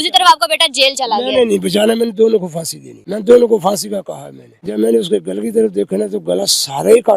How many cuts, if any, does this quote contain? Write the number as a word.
two